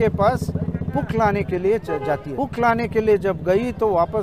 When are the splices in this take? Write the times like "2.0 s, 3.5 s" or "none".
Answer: 2.3 s